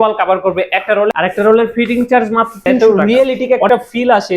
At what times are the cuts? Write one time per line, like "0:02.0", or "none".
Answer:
0:01.1
0:02.8